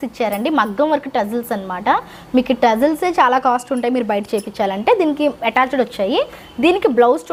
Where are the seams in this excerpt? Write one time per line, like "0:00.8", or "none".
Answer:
none